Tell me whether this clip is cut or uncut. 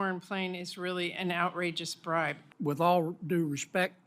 cut